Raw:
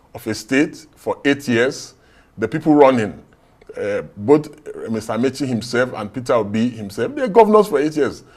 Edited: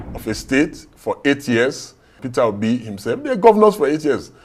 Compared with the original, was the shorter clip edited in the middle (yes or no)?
yes